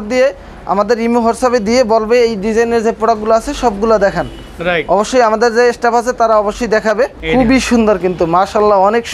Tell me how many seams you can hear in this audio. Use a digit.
0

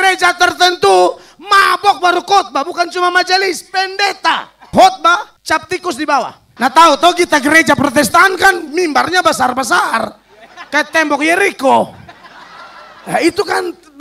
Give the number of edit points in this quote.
3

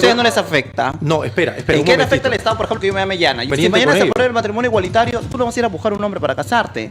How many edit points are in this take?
1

